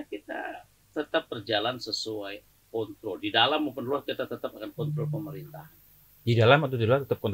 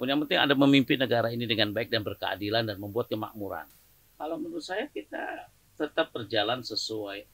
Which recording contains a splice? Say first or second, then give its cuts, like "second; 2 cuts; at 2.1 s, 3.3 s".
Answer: second; 1 cut; at 3.7 s